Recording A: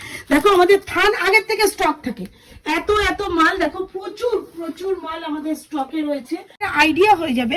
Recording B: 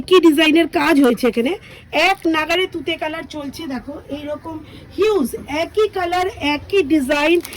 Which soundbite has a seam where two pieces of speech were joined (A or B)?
A